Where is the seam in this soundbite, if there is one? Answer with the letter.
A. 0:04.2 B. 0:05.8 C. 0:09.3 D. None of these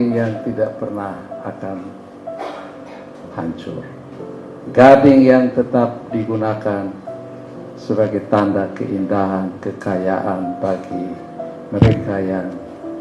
A